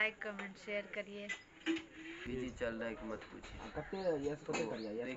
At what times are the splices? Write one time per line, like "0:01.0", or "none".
0:02.2